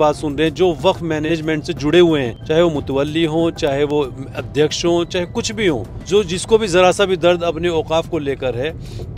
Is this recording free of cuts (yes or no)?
no